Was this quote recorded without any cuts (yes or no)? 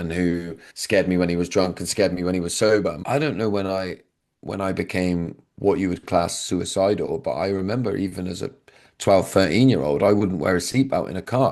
no